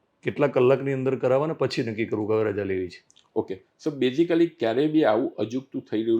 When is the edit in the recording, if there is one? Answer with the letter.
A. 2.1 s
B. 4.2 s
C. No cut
C